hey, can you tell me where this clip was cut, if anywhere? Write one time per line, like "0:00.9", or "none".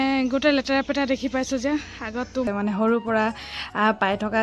0:02.5